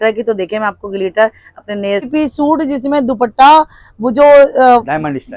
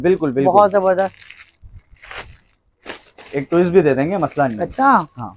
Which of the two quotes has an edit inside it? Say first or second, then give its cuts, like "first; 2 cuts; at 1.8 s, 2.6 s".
first; 1 cut; at 2.1 s